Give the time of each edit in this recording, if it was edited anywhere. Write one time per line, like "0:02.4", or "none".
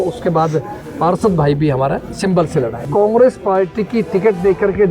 0:02.8